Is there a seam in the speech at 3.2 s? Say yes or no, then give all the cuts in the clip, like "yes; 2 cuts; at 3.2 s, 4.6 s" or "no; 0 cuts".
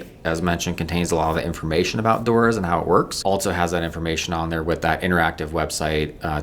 yes; 1 cut; at 3.2 s